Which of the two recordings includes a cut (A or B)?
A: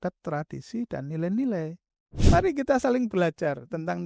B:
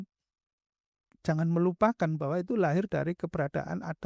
A